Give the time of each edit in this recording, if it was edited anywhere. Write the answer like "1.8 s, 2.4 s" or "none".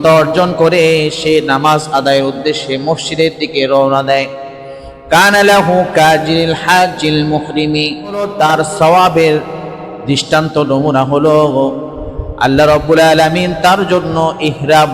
8.3 s